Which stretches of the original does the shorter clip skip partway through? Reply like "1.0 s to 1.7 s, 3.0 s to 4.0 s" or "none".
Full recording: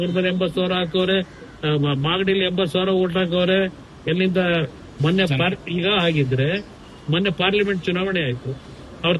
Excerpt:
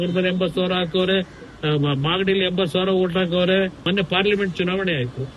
3.8 s to 7.1 s